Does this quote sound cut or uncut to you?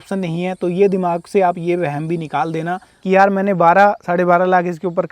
cut